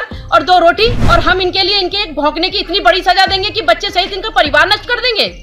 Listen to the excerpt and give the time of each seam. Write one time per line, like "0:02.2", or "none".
0:01.0